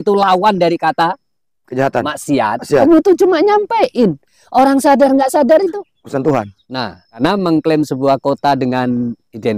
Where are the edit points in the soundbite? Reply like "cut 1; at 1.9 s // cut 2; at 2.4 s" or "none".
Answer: cut 1; at 2.8 s // cut 2; at 7.2 s